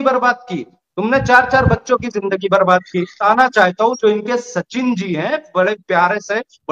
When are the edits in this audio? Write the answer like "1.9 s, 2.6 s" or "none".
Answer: 3.2 s